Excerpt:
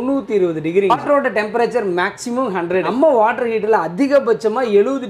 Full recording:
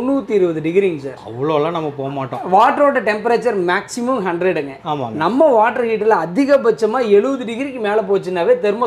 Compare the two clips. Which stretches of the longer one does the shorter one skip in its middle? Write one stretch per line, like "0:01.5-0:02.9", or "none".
0:01.0-0:02.7
0:04.6-0:05.3